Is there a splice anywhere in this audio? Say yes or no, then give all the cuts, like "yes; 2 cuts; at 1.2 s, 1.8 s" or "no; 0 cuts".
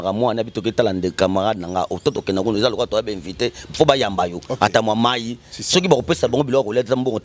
no; 0 cuts